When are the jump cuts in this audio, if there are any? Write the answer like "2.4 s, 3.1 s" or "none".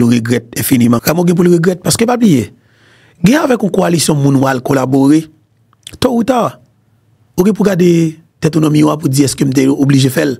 1.0 s